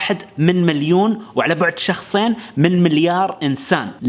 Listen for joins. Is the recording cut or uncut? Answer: uncut